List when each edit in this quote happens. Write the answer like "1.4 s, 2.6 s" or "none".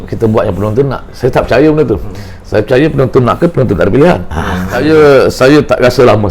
4.8 s